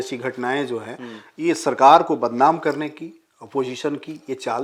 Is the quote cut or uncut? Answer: uncut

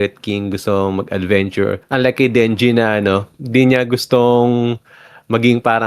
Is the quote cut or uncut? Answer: cut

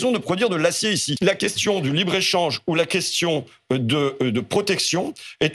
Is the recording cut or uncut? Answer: cut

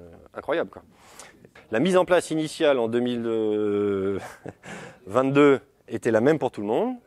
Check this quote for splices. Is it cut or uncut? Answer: uncut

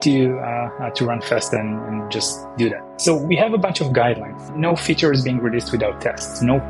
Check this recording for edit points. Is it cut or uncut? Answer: cut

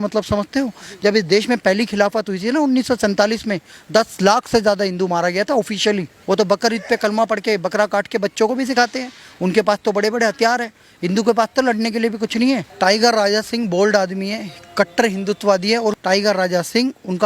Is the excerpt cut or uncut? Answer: cut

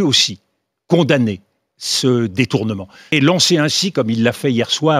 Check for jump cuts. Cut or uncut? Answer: cut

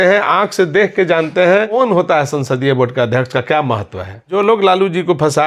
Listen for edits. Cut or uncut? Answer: cut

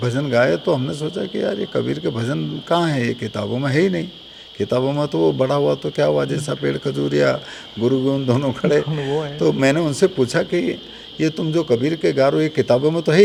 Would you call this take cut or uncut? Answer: uncut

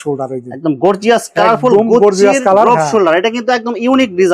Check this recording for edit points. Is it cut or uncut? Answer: uncut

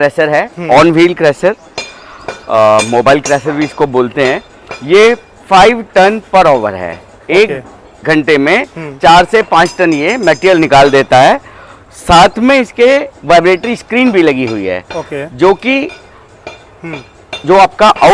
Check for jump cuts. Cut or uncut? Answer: uncut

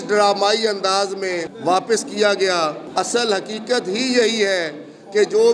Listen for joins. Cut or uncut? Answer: cut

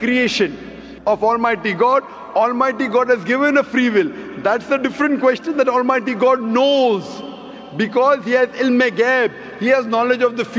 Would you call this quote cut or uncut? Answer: uncut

